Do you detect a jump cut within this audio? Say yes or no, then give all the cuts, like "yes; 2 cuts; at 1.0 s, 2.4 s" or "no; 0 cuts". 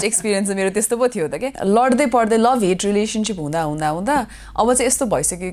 yes; 1 cut; at 1.5 s